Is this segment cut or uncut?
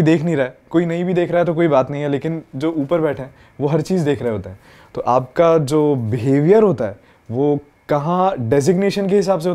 uncut